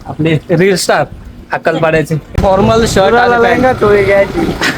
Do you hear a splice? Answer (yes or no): yes